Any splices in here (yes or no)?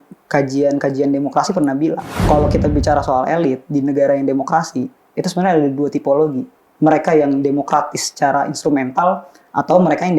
yes